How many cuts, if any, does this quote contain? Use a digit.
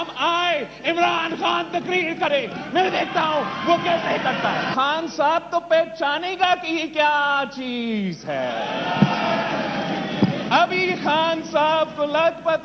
1